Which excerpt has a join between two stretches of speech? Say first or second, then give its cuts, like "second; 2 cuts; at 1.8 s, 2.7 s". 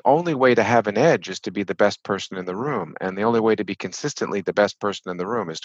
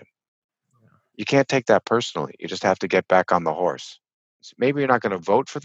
second; 1 cut; at 4.4 s